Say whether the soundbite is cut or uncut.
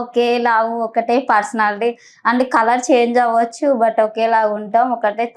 uncut